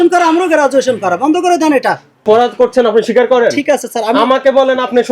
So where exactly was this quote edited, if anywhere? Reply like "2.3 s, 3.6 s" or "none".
2.2 s